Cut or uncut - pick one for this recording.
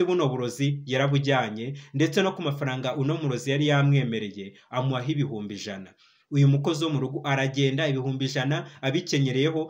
uncut